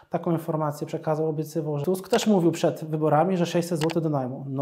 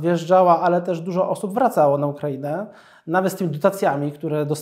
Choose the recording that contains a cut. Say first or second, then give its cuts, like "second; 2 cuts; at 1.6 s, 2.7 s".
first; 1 cut; at 1.8 s